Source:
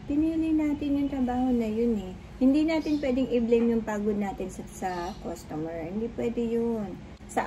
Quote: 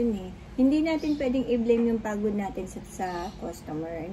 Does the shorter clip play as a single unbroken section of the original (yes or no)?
yes